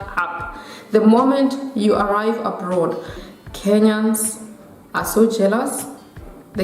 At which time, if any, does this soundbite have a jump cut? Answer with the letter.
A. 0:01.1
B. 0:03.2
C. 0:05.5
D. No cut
B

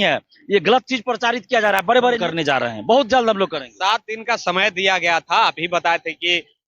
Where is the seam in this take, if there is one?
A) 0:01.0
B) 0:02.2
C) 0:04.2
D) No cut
B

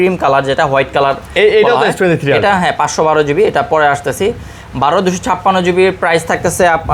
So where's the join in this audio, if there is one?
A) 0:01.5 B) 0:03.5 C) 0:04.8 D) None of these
D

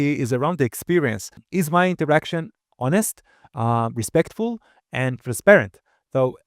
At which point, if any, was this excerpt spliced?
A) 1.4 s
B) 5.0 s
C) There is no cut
A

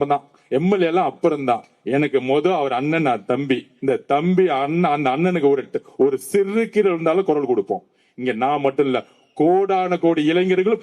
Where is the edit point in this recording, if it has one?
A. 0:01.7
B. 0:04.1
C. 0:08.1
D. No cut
D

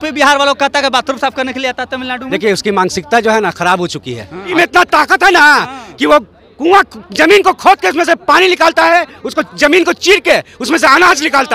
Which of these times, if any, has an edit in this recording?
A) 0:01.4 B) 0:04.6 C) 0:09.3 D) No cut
B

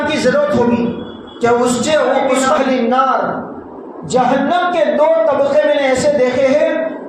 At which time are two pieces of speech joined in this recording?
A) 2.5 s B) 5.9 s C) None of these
A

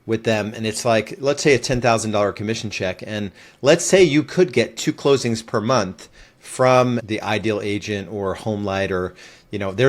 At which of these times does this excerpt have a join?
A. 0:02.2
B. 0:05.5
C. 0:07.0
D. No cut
C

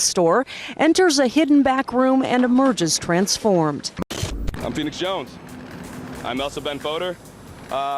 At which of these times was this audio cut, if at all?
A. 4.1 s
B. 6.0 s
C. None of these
A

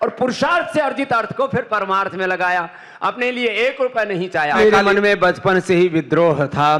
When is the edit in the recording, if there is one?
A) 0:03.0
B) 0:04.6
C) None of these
B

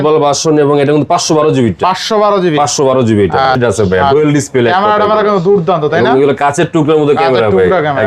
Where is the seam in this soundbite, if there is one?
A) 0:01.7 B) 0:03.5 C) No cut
B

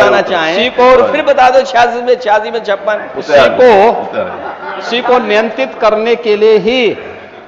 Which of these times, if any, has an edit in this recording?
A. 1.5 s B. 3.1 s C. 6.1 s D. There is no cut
D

